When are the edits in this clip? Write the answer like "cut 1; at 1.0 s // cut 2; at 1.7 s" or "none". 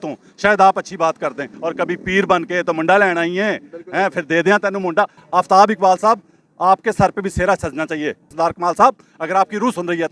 cut 1; at 1.5 s // cut 2; at 5.2 s // cut 3; at 8.2 s